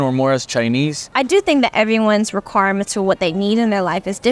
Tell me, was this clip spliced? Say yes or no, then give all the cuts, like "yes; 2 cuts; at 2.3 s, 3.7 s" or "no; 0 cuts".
yes; 1 cut; at 1.0 s